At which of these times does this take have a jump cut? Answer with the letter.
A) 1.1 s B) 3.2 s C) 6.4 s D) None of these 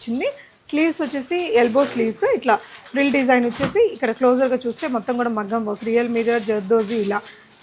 D